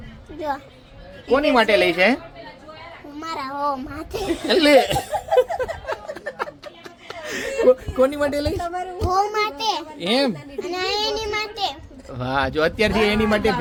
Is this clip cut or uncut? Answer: uncut